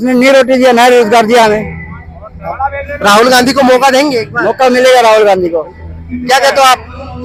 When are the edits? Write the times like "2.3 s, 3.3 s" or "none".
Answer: none